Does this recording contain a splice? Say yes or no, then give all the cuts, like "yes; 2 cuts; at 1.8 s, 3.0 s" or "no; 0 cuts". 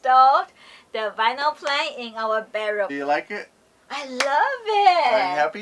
yes; 1 cut; at 2.9 s